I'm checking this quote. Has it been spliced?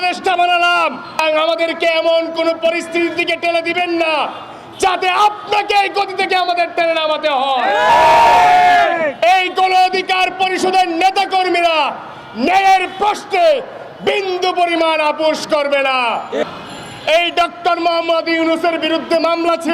yes; 2 cuts; at 1.2 s, 16.4 s

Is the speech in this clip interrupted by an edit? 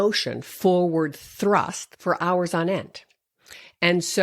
yes; 1 cut; at 1.8 s

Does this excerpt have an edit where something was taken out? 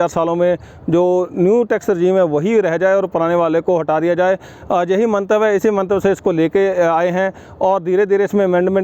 no; 0 cuts

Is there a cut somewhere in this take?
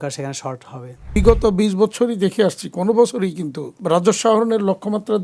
yes; 2 cuts; at 1.2 s, 3.8 s

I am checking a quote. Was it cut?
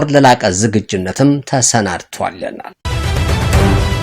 yes; 1 cut; at 2.8 s

